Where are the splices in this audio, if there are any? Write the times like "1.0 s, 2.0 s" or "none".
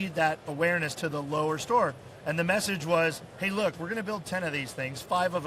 none